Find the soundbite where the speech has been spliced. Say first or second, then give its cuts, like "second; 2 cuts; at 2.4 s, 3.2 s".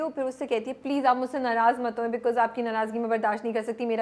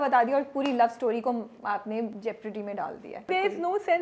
second; 2 cuts; at 2.2 s, 3.3 s